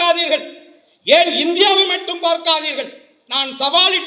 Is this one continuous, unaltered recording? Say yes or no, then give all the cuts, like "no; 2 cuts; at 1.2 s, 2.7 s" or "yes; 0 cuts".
yes; 0 cuts